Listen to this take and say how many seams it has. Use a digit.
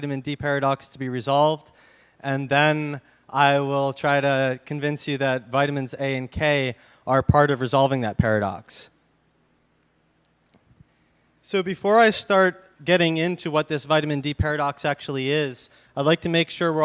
1